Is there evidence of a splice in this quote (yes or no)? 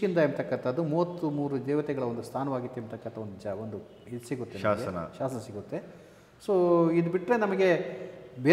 no